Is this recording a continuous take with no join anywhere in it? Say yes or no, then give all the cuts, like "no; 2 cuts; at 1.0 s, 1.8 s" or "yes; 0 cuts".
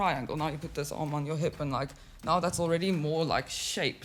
yes; 0 cuts